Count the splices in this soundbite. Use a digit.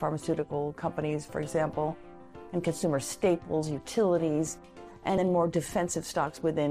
1